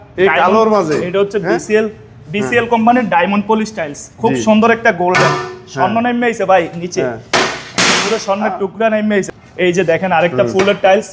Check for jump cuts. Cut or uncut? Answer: cut